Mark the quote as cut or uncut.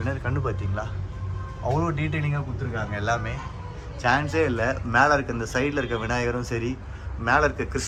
uncut